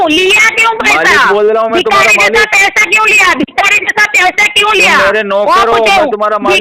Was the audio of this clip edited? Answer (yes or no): no